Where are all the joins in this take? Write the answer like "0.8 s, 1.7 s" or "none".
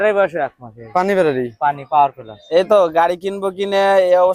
2.3 s